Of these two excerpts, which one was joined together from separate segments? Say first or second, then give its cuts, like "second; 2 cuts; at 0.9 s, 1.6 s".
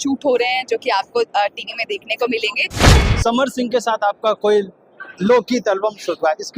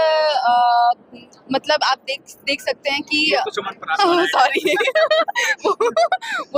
first; 1 cut; at 2.9 s